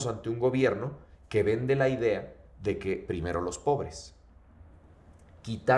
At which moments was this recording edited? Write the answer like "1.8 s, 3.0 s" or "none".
none